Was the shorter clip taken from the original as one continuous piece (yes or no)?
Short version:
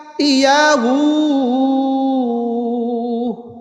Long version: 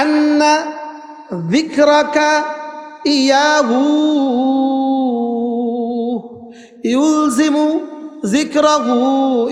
yes